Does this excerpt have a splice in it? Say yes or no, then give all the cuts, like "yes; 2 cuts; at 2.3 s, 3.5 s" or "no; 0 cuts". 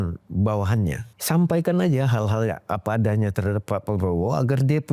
yes; 1 cut; at 1.1 s